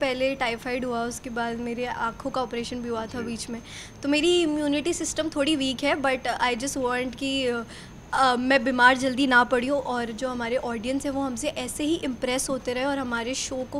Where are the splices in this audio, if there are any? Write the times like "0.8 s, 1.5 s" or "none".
none